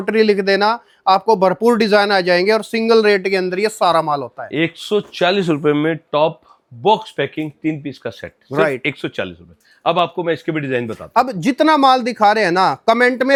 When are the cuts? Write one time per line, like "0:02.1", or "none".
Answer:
none